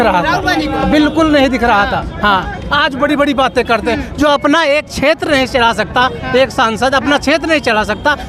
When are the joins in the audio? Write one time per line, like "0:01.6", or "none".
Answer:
none